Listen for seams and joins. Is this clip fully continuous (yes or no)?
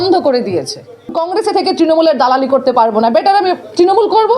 no